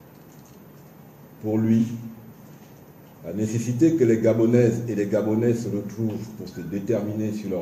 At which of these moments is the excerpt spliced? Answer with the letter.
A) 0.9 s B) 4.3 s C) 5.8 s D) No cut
B